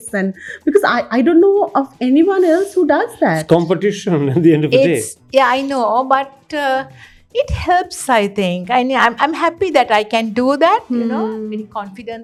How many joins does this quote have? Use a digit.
0